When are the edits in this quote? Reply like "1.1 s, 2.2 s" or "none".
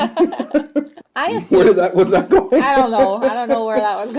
0.9 s